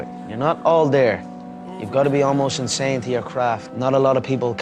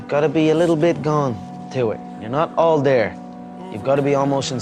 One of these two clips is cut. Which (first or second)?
first